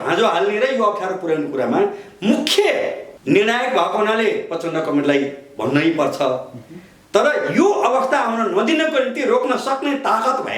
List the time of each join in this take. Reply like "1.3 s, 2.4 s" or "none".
3.1 s